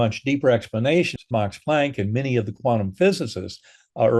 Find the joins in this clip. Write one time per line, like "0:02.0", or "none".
0:01.2